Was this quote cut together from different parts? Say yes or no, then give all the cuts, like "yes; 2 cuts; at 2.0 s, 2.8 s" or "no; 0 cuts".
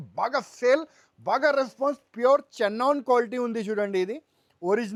no; 0 cuts